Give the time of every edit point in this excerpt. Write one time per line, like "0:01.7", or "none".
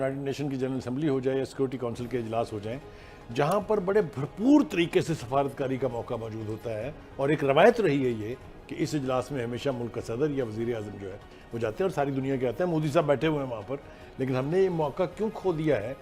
none